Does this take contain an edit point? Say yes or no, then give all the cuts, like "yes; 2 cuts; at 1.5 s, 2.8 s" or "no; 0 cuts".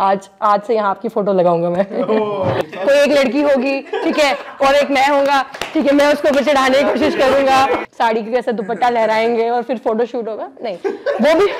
yes; 2 cuts; at 2.6 s, 7.8 s